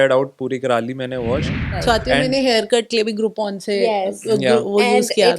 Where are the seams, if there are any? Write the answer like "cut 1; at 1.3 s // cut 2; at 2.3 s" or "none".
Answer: cut 1; at 1.6 s